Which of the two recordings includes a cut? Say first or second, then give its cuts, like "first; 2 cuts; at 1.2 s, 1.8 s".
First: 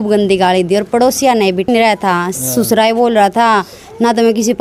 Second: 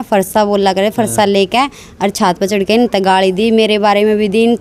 first; 1 cut; at 1.7 s